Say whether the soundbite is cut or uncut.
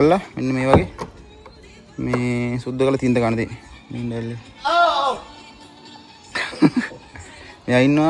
uncut